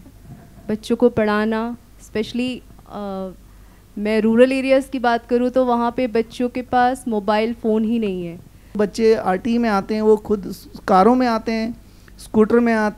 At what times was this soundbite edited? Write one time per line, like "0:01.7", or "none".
0:08.8